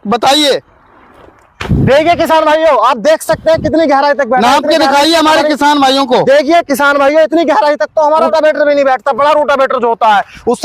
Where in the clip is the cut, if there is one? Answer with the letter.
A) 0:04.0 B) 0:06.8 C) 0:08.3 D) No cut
C